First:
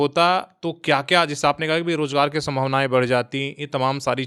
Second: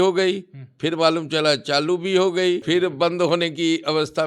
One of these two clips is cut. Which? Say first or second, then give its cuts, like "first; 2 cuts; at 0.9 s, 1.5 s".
second; 1 cut; at 2.6 s